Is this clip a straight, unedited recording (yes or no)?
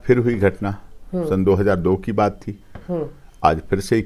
yes